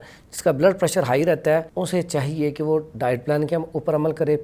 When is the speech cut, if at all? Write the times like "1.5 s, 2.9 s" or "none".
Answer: 1.7 s